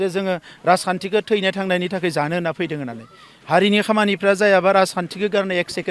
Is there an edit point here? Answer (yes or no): no